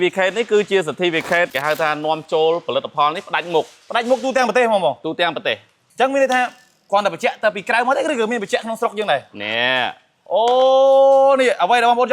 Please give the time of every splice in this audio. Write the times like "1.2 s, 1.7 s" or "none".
5.8 s